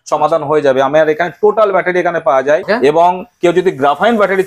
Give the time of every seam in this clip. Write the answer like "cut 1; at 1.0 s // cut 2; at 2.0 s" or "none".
cut 1; at 2.6 s